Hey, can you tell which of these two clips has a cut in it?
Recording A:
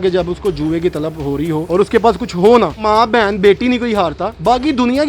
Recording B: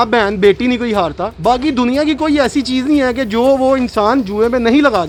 A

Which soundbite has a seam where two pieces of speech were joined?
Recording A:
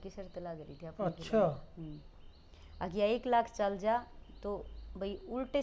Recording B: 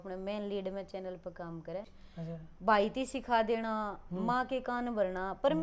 B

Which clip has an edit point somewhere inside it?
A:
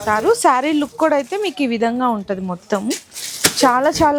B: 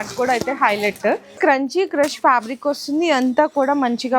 B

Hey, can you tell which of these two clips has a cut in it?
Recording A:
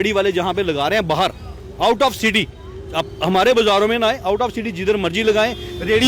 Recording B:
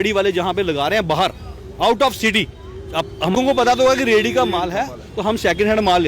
B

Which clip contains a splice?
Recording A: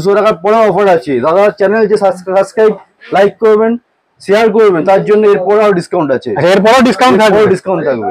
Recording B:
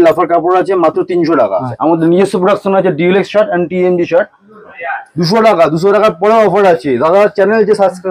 B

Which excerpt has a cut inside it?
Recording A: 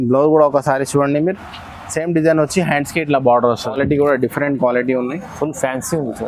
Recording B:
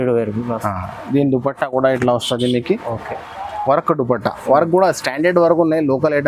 A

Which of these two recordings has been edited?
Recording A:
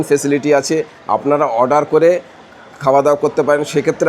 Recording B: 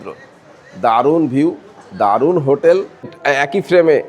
B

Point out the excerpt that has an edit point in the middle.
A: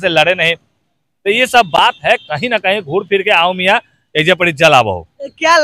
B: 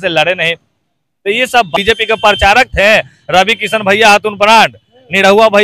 B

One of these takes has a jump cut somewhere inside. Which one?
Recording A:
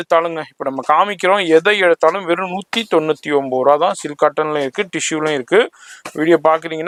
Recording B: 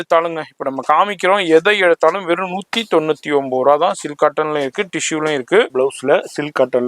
B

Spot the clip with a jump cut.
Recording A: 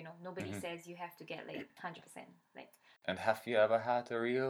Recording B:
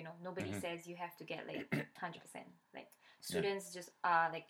A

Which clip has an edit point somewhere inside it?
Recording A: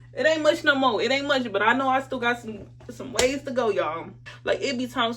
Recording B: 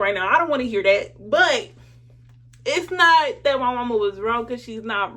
A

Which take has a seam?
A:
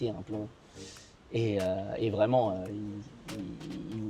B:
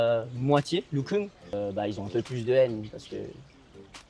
B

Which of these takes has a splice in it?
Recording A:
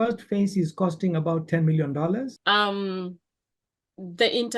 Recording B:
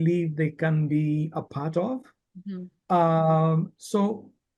A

